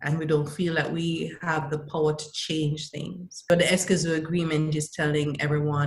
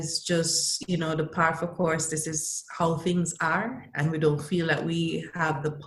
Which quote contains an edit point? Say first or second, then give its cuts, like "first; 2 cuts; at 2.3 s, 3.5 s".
first; 1 cut; at 3.5 s